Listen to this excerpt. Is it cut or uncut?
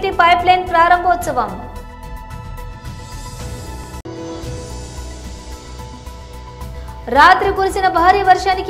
cut